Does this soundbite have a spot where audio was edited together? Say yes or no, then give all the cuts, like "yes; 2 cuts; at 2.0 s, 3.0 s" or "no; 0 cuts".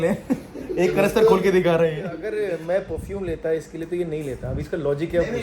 yes; 1 cut; at 2.1 s